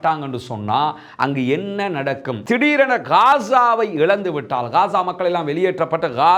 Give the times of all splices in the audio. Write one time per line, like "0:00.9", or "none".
0:02.3